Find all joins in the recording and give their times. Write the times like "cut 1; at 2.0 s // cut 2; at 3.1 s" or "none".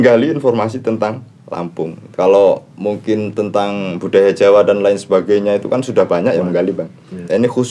cut 1; at 2.0 s